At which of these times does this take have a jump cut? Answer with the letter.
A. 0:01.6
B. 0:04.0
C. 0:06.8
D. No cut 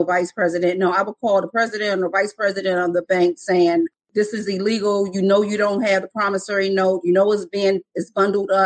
B